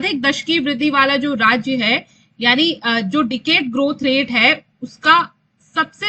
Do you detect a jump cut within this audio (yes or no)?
no